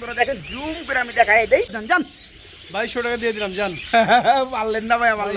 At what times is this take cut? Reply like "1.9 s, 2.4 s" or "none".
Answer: 1.8 s